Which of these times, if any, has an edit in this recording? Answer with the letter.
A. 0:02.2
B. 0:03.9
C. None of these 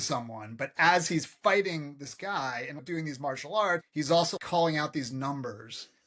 B